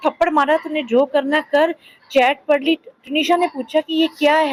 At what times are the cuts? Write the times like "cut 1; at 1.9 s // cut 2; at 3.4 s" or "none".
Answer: none